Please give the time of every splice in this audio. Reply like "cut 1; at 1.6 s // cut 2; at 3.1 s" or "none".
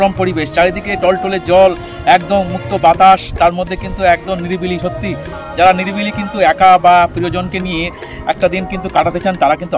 none